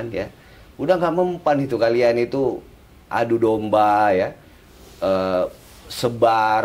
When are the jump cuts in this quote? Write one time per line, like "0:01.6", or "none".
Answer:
none

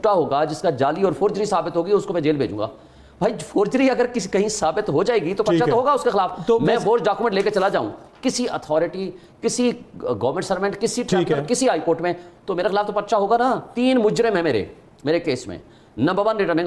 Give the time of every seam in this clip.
none

